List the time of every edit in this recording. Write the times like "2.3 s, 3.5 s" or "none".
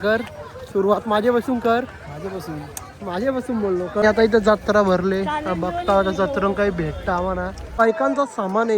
4.0 s, 7.6 s